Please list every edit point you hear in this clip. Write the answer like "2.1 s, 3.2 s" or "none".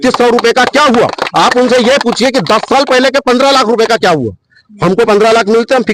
none